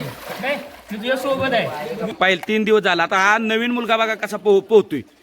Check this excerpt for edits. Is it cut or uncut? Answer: cut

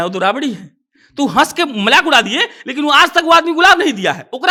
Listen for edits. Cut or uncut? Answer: uncut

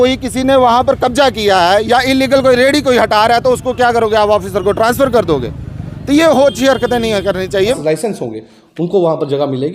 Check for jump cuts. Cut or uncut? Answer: cut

